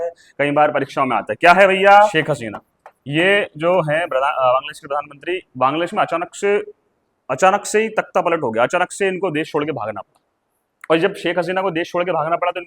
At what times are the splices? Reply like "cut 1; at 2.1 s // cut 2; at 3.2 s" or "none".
cut 1; at 2.2 s